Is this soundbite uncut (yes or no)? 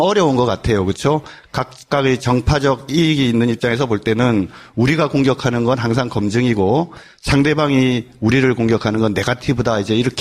no